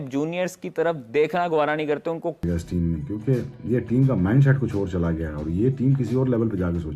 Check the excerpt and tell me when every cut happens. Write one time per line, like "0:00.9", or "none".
0:02.4